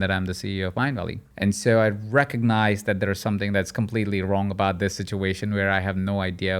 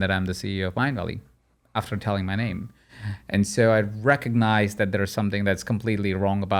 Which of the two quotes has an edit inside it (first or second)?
first